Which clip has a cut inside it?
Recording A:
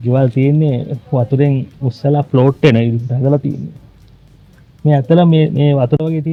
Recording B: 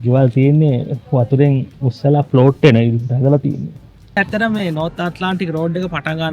B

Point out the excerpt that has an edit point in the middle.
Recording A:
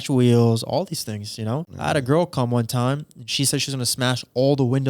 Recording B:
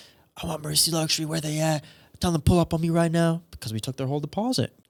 A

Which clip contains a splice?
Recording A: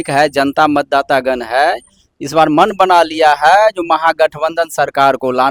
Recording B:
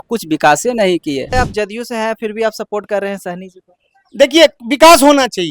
B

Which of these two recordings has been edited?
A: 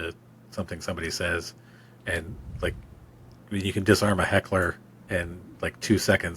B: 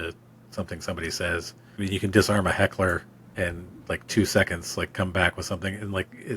B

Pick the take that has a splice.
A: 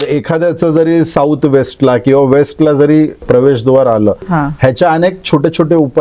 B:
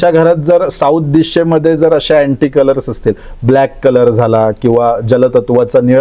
A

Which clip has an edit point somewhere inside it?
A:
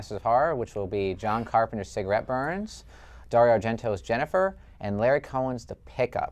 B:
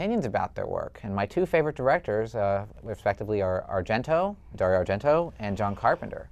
A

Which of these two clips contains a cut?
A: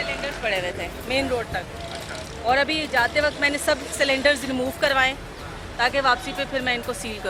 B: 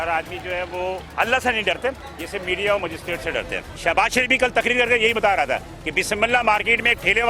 B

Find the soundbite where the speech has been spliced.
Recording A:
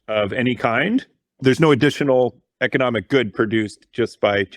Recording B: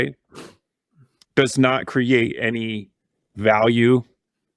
A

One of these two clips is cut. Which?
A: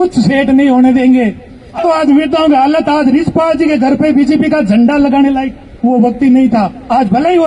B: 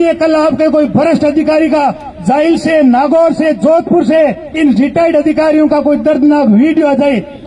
A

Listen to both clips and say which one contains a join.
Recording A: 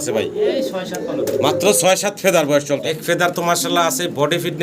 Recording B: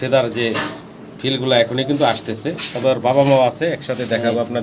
A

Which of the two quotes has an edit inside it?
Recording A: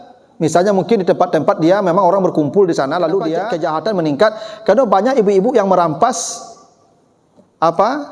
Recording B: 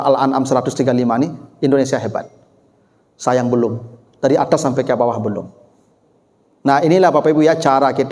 A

